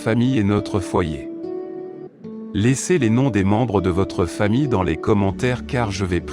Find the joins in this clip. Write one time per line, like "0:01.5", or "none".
0:01.1
0:02.5